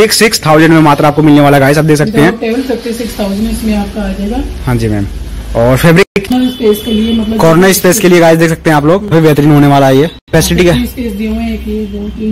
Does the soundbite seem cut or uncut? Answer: cut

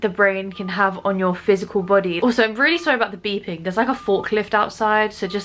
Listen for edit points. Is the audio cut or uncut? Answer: cut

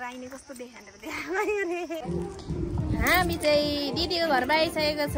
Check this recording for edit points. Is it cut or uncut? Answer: cut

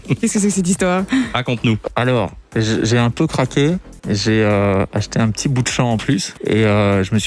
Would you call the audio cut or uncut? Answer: cut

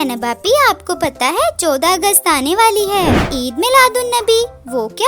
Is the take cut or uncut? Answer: cut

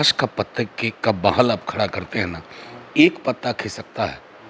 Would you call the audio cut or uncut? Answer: uncut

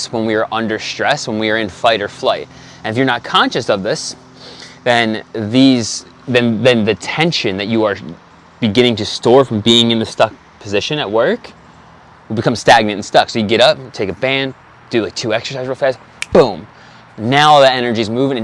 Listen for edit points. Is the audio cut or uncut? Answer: uncut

